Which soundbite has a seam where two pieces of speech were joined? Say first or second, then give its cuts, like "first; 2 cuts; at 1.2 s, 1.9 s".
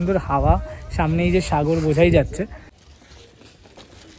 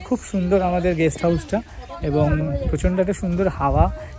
first; 1 cut; at 2.6 s